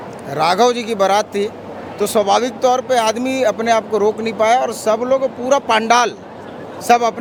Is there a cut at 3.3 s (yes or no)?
no